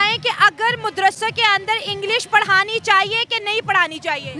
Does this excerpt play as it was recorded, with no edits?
yes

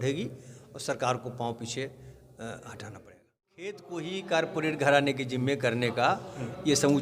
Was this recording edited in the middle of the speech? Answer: yes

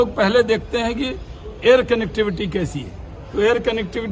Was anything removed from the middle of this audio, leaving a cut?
no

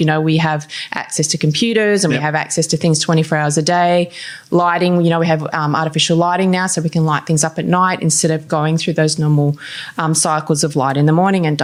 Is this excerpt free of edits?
yes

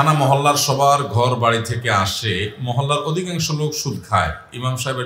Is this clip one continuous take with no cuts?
yes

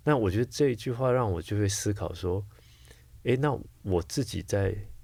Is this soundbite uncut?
yes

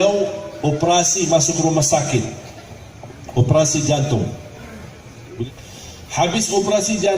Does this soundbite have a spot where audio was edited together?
yes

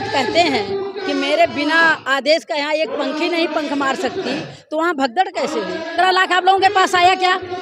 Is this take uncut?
no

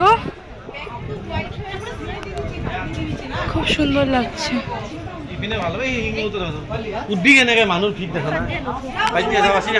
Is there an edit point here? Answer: no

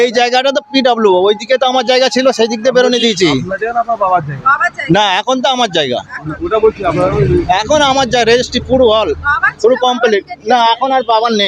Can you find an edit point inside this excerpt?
no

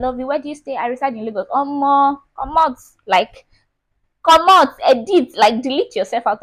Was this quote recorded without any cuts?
yes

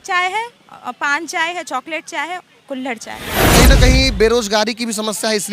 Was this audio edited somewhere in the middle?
yes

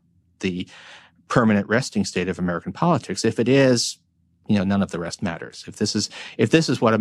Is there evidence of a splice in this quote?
no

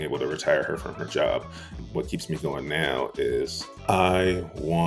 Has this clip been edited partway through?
yes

